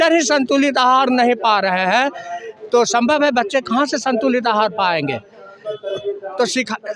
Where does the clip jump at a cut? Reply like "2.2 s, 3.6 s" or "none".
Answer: none